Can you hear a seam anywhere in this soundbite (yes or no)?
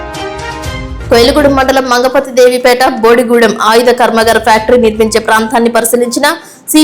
yes